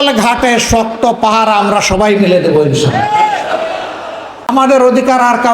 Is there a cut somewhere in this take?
yes; 1 cut; at 4.5 s

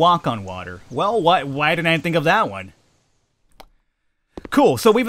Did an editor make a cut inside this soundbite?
no; 0 cuts

